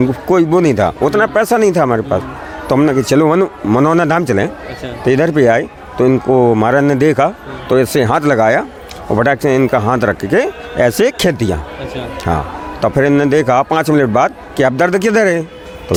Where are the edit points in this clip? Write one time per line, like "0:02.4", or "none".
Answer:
none